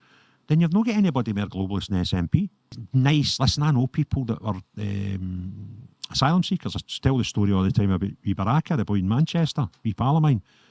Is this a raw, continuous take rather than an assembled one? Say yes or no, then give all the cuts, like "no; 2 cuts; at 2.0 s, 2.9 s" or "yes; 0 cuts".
no; 1 cut; at 2.8 s